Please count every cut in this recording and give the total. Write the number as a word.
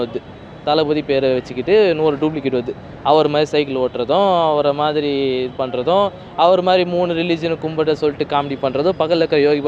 zero